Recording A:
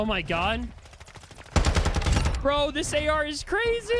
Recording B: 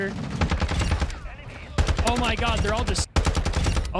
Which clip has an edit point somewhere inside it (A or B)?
B